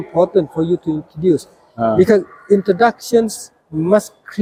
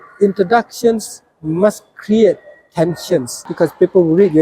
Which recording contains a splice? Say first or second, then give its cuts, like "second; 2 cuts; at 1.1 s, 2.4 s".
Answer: second; 1 cut; at 3.5 s